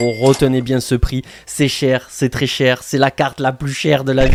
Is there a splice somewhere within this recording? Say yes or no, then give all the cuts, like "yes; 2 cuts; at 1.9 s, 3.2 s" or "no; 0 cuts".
no; 0 cuts